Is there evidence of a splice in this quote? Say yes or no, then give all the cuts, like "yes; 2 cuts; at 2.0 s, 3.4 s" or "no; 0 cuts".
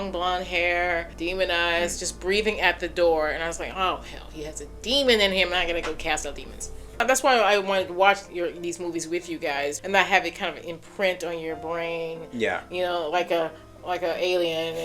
yes; 3 cuts; at 1.1 s, 7.0 s, 9.8 s